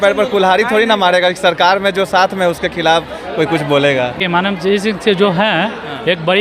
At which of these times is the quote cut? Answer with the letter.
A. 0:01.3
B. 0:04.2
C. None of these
B